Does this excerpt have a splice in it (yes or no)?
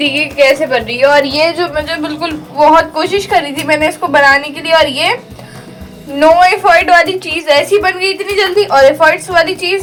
no